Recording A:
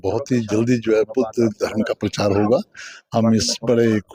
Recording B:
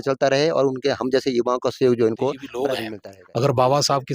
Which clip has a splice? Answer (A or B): B